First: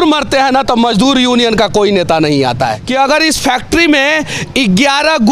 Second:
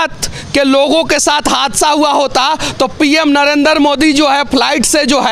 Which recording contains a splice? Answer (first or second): first